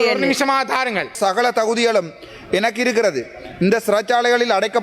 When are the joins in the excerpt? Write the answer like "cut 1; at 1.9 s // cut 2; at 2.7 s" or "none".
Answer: cut 1; at 1.2 s